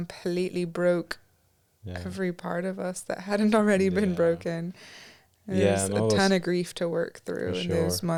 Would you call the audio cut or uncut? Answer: uncut